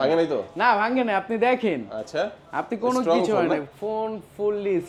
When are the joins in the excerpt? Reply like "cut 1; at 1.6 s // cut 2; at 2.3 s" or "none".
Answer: none